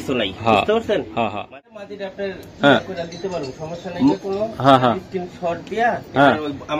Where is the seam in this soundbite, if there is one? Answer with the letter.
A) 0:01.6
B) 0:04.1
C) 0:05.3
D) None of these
A